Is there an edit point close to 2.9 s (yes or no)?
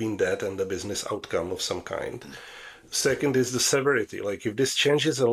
no